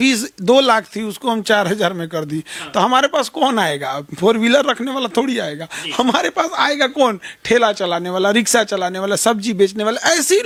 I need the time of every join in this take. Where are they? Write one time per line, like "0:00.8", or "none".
none